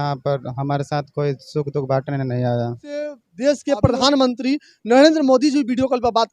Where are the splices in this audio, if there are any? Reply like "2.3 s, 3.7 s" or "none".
3.3 s